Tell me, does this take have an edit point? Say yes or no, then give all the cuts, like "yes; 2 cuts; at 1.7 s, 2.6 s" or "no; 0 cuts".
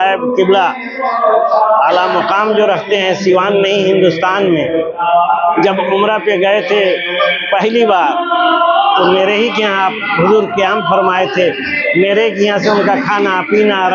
no; 0 cuts